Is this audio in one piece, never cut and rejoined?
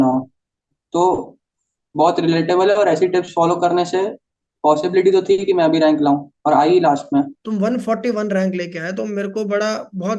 no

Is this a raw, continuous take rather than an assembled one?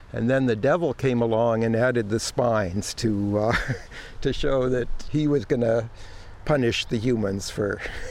no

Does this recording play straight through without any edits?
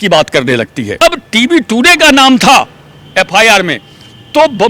no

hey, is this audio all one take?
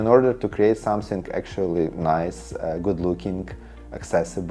yes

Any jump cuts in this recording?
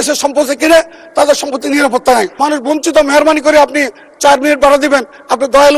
yes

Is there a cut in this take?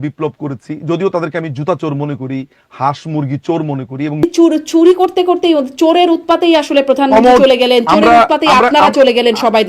yes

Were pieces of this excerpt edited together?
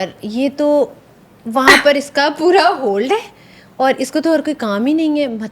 no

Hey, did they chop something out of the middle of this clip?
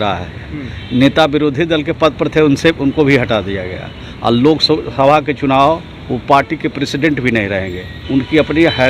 yes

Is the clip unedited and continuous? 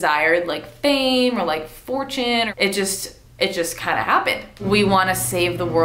no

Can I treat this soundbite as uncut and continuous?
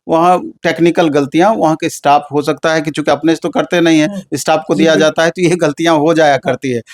yes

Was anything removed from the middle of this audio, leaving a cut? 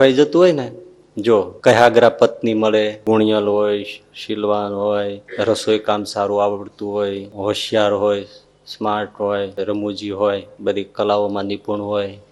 yes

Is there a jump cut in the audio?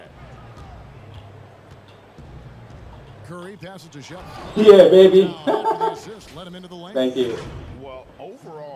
no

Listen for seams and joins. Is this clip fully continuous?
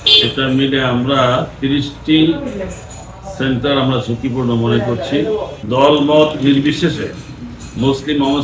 no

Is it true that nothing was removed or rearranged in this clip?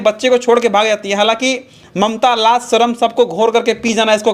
yes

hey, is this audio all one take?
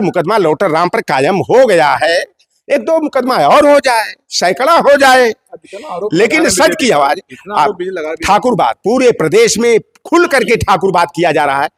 yes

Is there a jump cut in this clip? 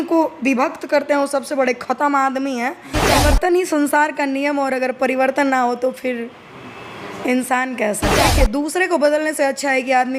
yes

